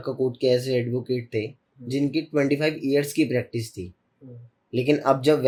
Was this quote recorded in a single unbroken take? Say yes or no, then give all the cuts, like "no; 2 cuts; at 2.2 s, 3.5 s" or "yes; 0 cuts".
yes; 0 cuts